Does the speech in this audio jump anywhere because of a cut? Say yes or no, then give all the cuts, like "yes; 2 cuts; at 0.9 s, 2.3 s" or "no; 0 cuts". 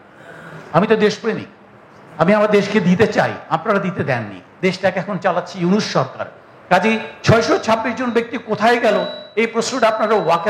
yes; 1 cut; at 4.4 s